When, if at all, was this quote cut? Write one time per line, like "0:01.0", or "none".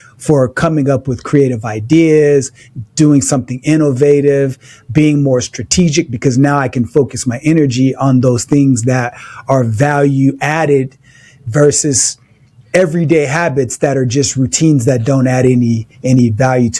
none